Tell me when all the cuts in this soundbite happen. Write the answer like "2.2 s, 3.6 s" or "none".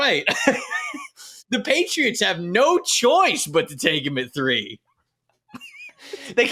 none